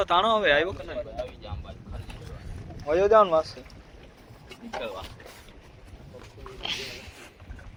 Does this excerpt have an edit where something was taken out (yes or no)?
no